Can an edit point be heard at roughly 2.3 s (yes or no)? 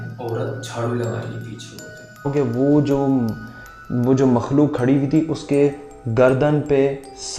yes